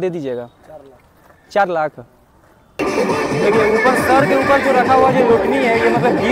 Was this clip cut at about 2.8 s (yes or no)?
yes